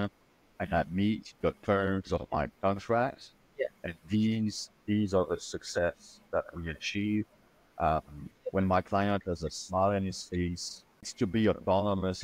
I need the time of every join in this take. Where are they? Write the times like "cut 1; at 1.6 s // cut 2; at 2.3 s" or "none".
cut 1; at 1.3 s // cut 2; at 11.1 s